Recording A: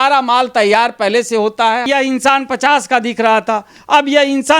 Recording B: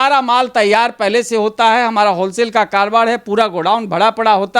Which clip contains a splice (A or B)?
A